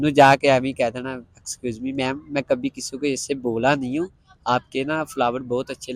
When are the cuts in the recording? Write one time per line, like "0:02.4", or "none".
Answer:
none